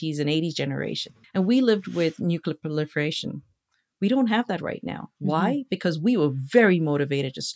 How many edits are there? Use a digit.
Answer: 1